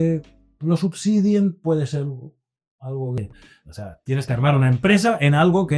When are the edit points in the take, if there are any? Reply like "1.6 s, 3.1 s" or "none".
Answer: 3.2 s